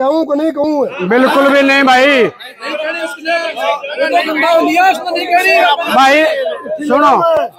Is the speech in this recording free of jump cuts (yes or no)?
yes